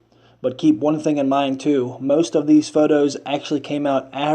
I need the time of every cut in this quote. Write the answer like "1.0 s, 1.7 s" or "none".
2.5 s